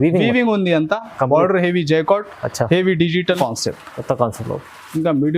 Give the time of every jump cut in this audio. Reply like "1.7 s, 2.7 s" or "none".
3.4 s